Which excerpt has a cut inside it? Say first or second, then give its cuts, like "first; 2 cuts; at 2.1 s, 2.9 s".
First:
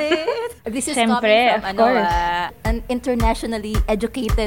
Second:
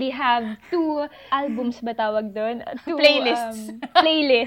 second; 1 cut; at 1.2 s